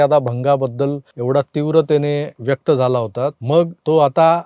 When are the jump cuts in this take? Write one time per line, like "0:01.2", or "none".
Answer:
0:01.1
0:02.3
0:03.5